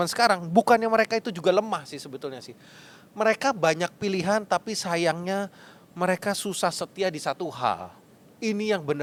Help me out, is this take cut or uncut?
uncut